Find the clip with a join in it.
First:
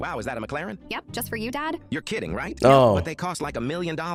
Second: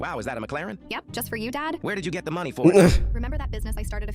second; 1 cut; at 1.8 s

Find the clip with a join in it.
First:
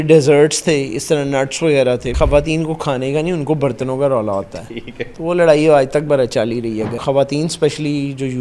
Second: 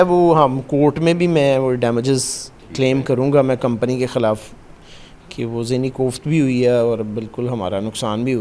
first; 2 cuts; at 2.1 s, 7.0 s

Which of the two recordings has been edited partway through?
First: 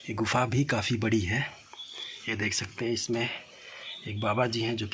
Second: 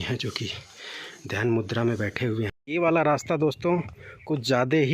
second; 1 cut; at 2.5 s

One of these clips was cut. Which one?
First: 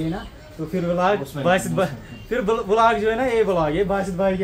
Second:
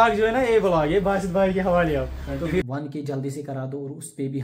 second; 1 cut; at 2.6 s

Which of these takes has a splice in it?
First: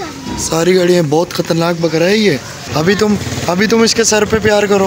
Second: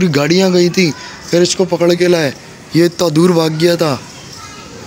first; 1 cut; at 2.6 s

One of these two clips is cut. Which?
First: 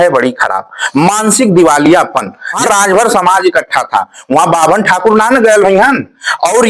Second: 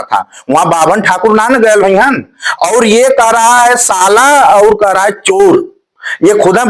first; 1 cut; at 2.6 s

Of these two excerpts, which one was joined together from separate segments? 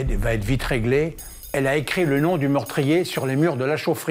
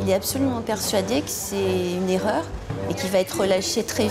first; 1 cut; at 1.3 s

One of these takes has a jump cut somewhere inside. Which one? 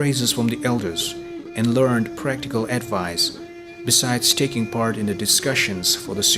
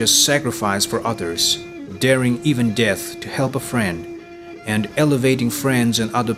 first; 1 cut; at 3.1 s

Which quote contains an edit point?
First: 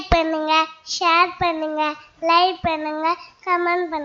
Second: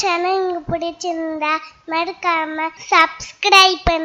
second; 1 cut; at 2.8 s

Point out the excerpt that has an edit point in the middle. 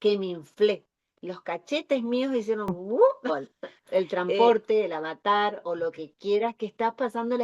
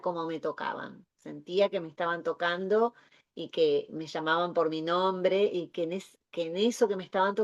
first; 1 cut; at 3.2 s

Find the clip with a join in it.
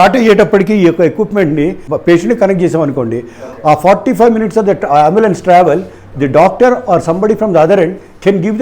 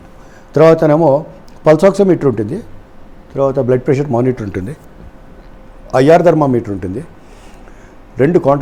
first; 1 cut; at 1.9 s

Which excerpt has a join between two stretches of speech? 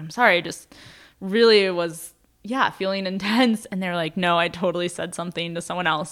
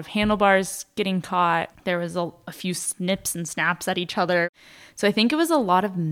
second; 2 cuts; at 1.7 s, 4.5 s

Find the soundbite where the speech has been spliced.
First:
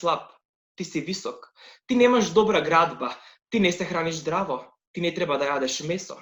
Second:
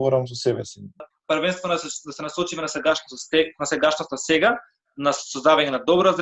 second; 1 cut; at 1.0 s

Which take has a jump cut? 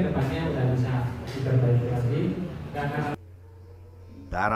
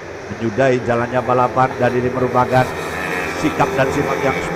first; 1 cut; at 3.1 s

